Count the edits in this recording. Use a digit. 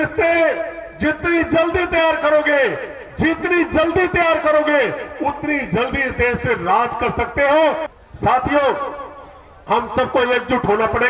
1